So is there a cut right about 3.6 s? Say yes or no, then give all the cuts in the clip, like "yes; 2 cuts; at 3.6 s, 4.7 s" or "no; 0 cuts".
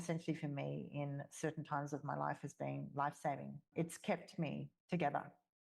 yes; 2 cuts; at 3.6 s, 4.7 s